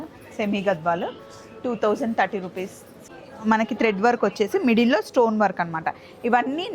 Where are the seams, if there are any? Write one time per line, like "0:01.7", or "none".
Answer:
0:03.1